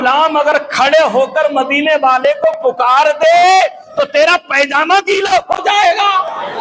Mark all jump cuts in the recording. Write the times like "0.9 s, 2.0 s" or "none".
none